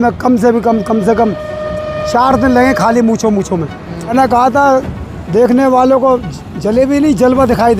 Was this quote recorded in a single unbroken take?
no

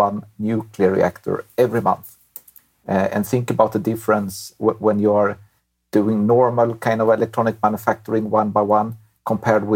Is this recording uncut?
yes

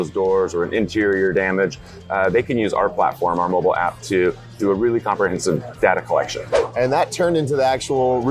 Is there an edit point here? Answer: yes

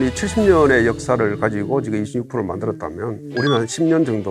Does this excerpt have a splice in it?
no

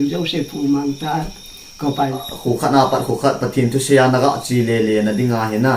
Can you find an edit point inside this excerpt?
yes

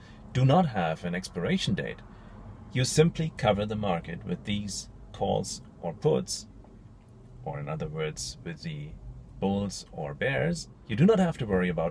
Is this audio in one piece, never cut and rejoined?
no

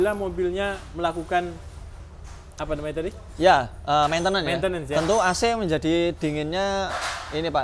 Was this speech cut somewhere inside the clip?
no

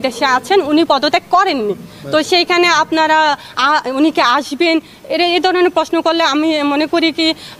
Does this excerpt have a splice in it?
no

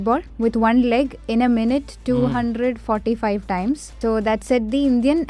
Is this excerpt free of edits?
no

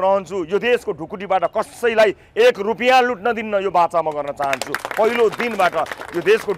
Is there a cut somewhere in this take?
no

